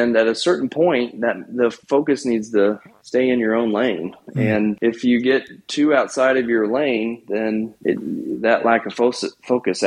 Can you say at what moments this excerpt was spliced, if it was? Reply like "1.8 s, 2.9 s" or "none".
1.8 s, 2.9 s, 4.3 s, 7.7 s